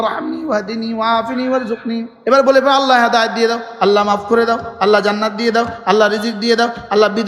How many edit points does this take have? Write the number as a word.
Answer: one